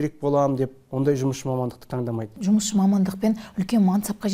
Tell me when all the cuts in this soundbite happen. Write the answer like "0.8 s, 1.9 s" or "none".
2.3 s